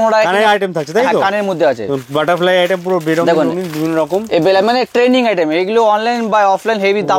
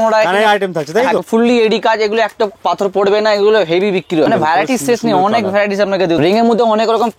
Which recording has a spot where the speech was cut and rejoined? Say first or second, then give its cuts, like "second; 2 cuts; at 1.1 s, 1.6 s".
second; 3 cuts; at 1.2 s, 4.3 s, 6.2 s